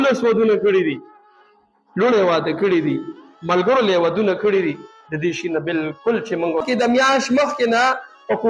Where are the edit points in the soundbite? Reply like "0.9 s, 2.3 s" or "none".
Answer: 6.6 s